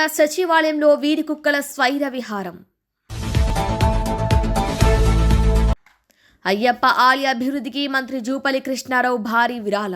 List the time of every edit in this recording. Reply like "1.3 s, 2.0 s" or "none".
none